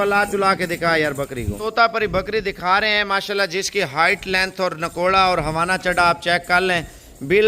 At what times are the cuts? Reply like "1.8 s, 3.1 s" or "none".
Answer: 1.6 s